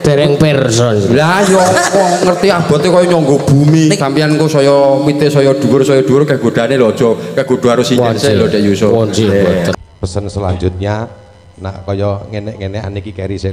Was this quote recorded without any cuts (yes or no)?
no